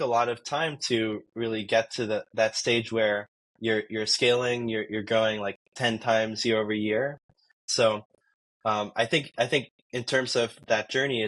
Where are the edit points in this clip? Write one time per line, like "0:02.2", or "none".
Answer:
0:07.6